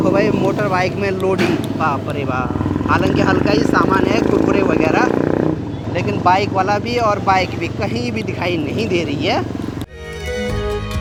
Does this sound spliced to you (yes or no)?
no